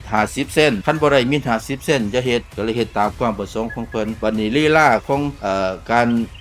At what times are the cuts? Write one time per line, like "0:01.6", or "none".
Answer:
0:02.5
0:04.2